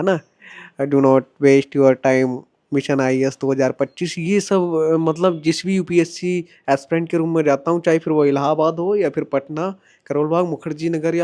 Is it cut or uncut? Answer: uncut